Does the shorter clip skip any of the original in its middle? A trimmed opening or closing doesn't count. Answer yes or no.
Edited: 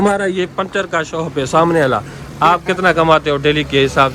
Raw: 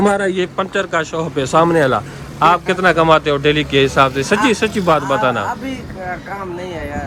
no